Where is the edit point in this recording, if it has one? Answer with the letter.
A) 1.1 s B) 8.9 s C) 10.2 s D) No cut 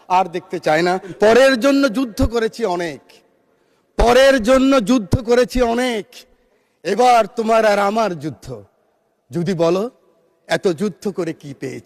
A